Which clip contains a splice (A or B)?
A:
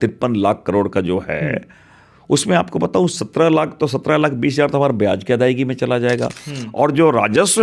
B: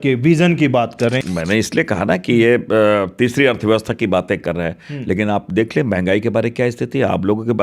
B